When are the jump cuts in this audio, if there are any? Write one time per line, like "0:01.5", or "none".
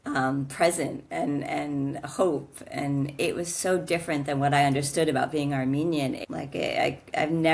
0:06.2